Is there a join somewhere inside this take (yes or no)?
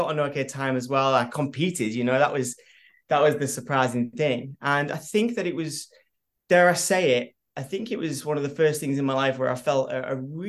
no